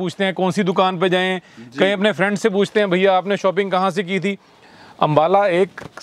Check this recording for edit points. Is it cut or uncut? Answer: uncut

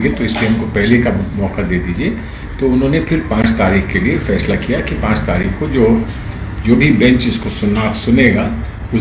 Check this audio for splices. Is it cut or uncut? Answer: uncut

